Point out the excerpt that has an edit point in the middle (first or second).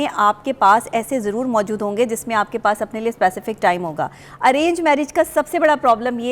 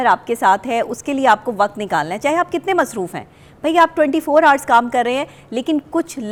first